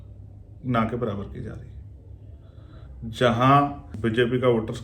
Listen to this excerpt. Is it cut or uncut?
cut